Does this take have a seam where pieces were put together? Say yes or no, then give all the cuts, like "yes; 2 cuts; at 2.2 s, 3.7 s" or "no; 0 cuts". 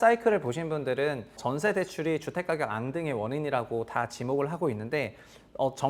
yes; 1 cut; at 1.4 s